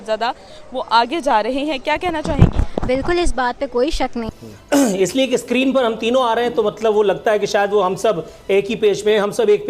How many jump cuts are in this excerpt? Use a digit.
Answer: 1